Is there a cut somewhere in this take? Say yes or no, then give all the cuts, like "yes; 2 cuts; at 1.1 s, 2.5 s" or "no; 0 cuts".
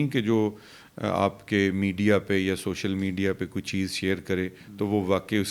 no; 0 cuts